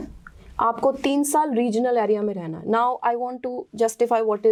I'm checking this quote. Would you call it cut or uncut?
uncut